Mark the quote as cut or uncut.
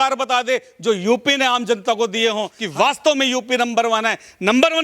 cut